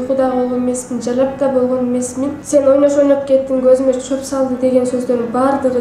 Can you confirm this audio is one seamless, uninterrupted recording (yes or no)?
no